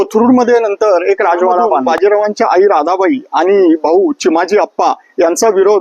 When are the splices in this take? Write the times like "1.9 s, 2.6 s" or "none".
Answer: 1.8 s

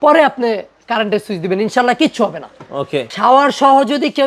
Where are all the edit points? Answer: 3.0 s

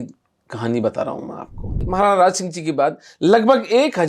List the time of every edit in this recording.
1.8 s

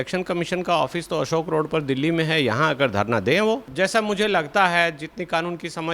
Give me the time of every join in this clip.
3.7 s

